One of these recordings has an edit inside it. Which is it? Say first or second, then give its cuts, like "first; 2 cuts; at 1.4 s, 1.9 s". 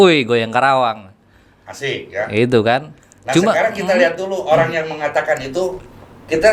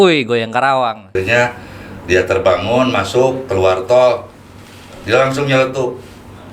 second; 1 cut; at 1.2 s